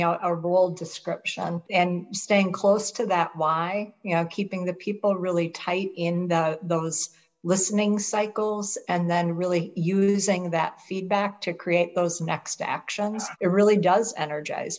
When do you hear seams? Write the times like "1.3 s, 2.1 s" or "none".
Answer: 1.7 s, 13.3 s

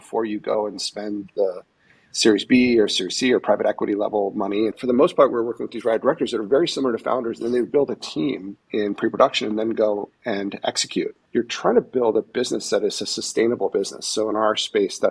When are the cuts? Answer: 4.8 s, 8.5 s, 11.2 s

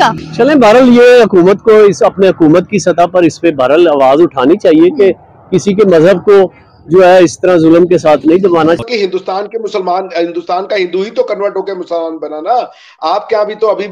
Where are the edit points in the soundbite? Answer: 8.8 s

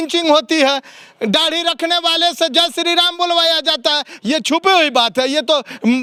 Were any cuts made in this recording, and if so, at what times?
none

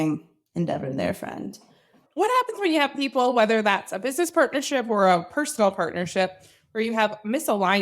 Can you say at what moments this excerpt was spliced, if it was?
2.0 s

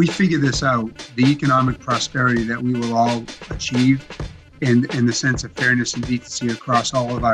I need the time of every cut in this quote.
3.5 s

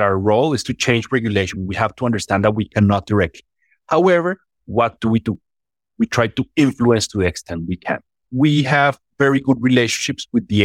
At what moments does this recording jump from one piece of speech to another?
1.5 s, 8.2 s

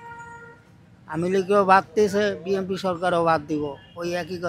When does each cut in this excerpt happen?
none

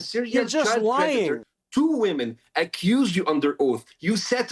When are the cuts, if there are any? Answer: 1.5 s

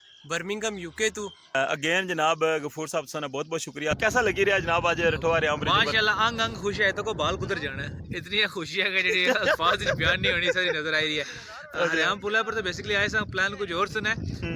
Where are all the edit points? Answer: 1.6 s, 4.0 s

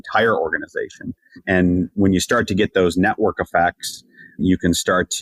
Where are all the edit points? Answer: none

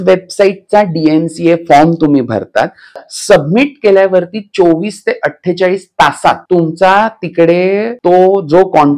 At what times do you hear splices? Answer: 2.9 s, 6.4 s, 7.9 s

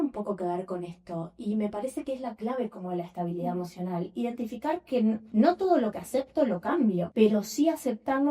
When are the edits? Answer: 5.2 s, 7.1 s

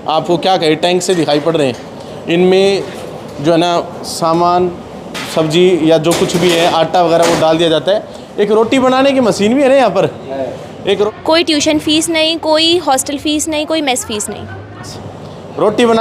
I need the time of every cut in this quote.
11.1 s, 14.9 s

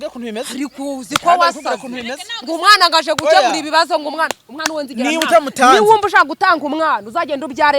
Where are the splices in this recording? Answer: 4.6 s

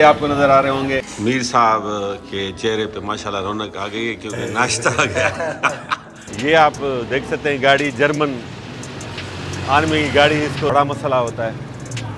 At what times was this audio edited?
1.1 s, 6.2 s, 10.7 s

